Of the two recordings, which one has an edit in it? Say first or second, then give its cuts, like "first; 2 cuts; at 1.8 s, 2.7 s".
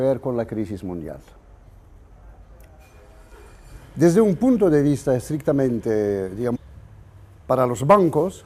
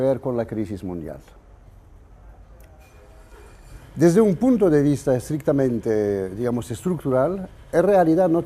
second; 1 cut; at 6.7 s